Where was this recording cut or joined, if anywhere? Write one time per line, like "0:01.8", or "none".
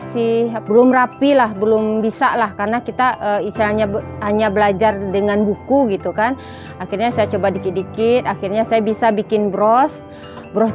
none